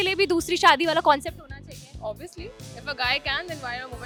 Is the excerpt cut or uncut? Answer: uncut